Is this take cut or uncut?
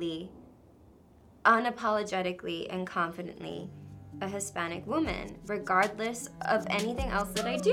uncut